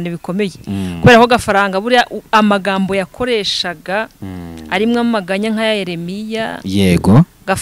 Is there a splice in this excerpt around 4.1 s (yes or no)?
no